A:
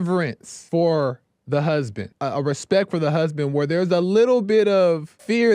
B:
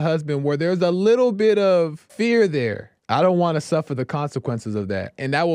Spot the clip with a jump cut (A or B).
A